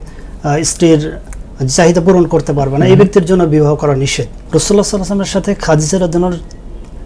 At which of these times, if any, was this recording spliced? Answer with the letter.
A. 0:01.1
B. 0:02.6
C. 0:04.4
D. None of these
C